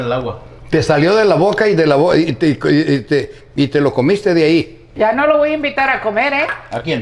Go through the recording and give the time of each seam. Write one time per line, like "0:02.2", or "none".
0:04.9